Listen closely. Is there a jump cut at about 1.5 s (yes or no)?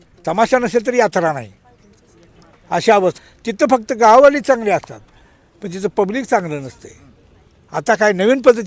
no